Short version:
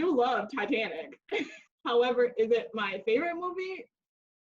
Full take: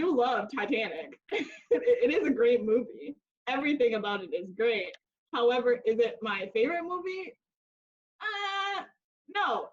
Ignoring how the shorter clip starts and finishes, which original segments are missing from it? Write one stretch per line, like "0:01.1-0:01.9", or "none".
0:01.5-0:05.0

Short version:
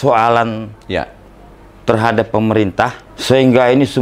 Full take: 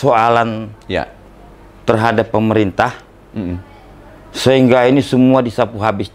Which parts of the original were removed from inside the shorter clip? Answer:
0:03.1-0:04.2

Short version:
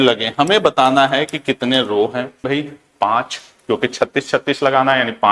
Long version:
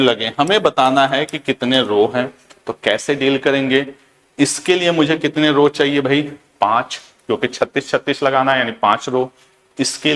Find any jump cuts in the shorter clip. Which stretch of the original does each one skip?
0:02.4-0:06.0

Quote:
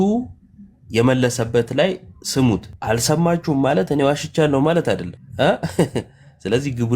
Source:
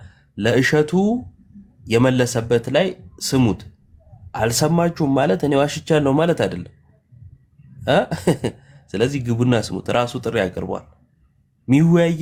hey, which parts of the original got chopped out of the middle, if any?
0:03.7-0:04.2
0:06.7-0:07.7

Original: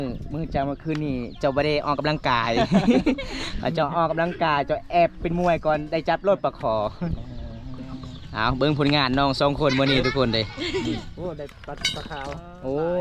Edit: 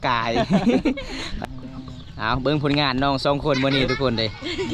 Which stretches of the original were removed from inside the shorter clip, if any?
0:03.4-0:07.4

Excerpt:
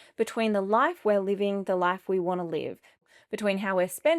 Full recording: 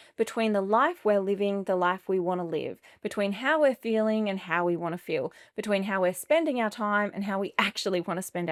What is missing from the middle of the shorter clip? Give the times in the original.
0:03.1-0:05.3

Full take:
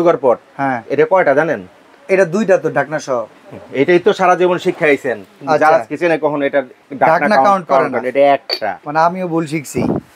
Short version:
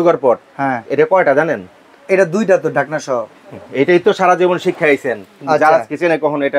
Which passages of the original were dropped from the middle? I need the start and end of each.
none

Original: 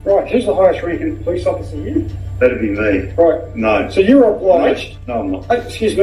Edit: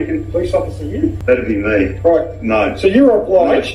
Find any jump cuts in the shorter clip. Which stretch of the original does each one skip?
0:02.1-0:02.3

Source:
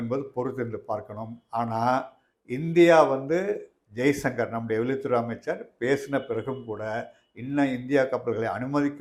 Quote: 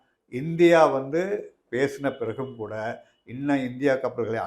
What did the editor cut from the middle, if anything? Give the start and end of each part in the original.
0:03.8-0:05.7

